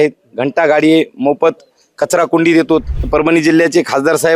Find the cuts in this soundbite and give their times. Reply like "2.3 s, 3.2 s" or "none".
3.0 s